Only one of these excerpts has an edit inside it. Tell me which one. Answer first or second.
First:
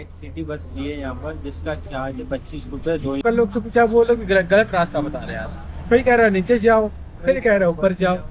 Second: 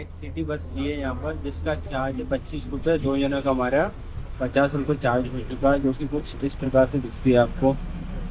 first